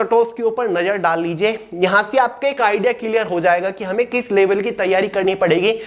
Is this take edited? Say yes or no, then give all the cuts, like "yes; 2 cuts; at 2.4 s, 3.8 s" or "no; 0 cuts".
no; 0 cuts